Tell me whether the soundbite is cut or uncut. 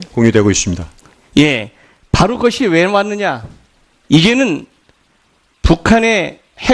uncut